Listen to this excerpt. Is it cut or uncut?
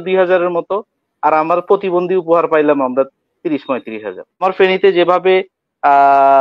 cut